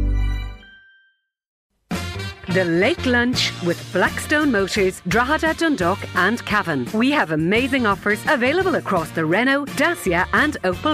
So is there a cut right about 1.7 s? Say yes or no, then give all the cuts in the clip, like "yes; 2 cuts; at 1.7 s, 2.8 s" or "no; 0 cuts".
yes; 1 cut; at 1.7 s